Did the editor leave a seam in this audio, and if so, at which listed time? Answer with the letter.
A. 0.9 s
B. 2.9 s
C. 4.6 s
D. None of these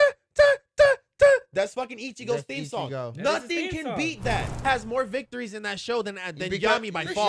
C